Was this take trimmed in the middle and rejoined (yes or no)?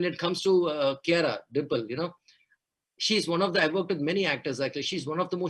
no